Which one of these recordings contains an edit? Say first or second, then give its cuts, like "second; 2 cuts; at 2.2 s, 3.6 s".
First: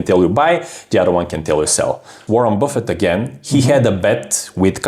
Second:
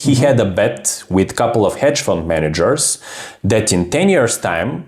first; 1 cut; at 2.2 s